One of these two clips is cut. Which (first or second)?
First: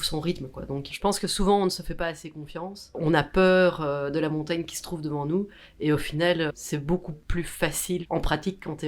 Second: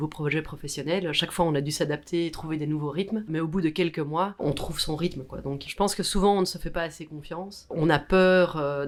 first